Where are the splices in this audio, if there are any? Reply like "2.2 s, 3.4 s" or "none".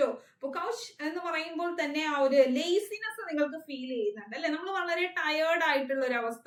none